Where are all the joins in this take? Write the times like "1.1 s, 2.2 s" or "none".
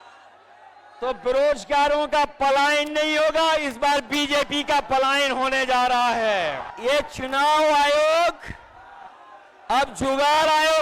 6.7 s